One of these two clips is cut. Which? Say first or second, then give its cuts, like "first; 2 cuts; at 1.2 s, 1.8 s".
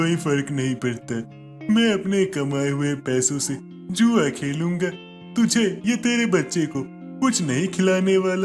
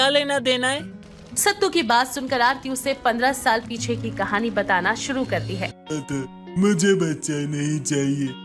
second; 1 cut; at 5.7 s